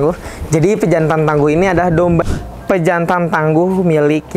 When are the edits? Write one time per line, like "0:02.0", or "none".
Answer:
0:02.2